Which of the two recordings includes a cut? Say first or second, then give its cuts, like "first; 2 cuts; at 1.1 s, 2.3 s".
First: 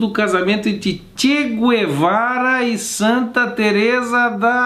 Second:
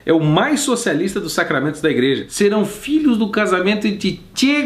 second; 1 cut; at 2.3 s